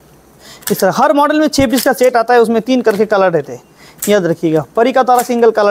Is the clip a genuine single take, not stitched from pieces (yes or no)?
yes